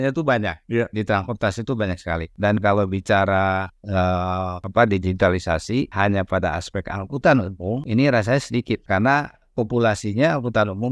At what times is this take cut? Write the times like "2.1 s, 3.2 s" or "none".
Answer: 2.3 s, 4.6 s, 5.9 s, 7.8 s, 8.8 s